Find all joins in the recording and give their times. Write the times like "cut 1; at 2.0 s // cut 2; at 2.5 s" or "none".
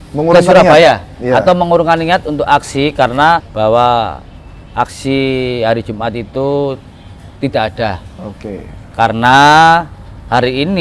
cut 1; at 3.5 s